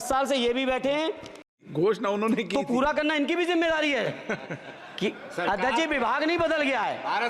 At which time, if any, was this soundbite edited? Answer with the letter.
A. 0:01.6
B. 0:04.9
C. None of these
A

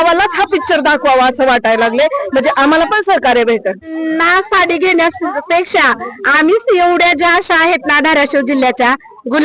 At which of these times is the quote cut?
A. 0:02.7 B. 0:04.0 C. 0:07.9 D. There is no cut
B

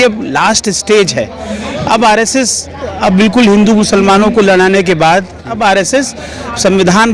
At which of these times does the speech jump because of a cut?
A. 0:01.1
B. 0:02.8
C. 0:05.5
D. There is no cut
C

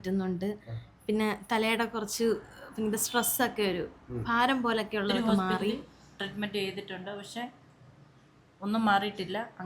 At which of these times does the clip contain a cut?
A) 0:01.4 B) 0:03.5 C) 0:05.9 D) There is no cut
C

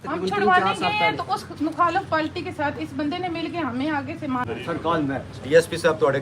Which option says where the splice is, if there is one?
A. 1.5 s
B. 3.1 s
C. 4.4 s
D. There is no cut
C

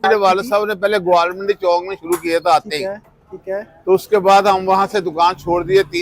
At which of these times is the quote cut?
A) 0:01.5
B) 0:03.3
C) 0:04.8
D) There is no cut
D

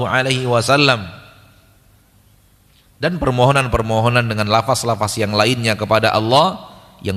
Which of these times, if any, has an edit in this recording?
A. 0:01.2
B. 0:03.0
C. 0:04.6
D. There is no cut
D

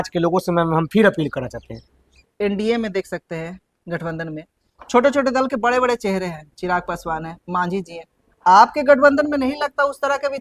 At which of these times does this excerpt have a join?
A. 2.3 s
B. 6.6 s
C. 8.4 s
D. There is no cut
A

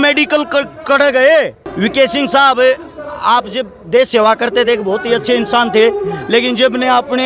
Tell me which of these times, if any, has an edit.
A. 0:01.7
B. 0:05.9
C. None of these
A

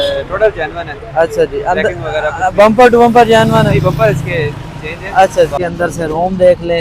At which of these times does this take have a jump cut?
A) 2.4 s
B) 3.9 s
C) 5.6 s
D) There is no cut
C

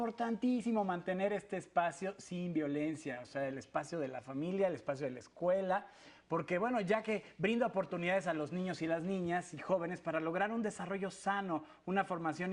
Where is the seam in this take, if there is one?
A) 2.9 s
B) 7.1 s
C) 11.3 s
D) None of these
A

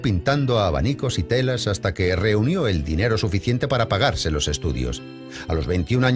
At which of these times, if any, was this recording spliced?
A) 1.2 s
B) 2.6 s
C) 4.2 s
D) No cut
B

